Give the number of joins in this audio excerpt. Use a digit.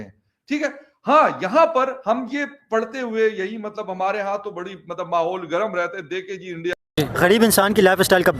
1